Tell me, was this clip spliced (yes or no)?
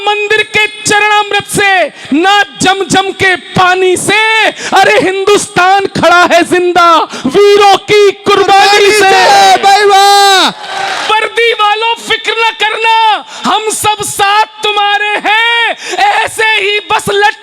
yes